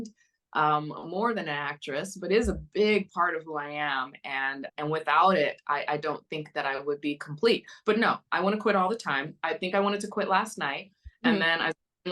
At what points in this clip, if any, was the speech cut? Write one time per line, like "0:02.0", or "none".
0:04.7